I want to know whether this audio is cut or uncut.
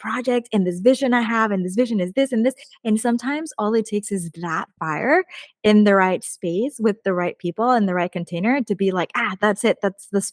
uncut